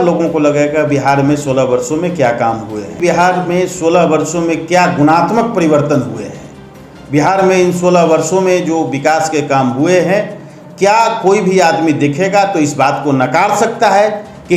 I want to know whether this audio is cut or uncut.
cut